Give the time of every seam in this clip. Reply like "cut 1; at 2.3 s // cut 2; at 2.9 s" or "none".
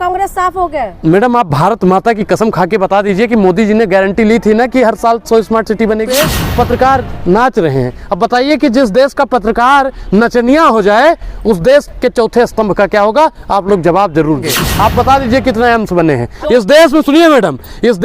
cut 1; at 6.1 s // cut 2; at 14.6 s